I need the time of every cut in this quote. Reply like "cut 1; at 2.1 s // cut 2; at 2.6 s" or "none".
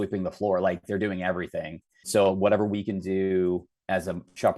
cut 1; at 2.1 s